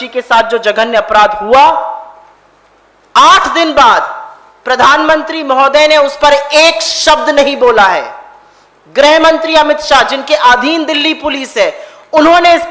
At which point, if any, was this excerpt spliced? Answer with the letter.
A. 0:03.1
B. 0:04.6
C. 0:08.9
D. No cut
D